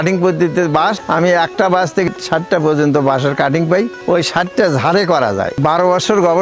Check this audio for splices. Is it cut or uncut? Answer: cut